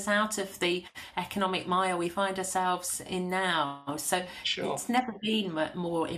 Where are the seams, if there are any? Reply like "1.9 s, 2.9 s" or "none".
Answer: none

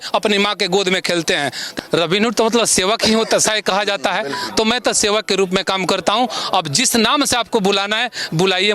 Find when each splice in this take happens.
1.6 s

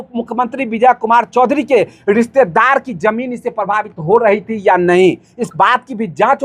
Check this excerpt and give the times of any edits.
none

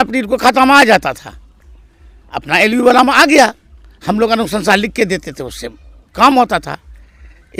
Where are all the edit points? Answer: none

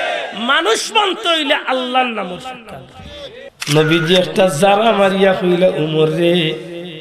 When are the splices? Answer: 3.5 s

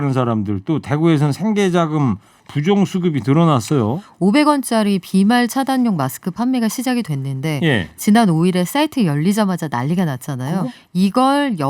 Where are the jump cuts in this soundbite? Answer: 4.0 s, 10.6 s

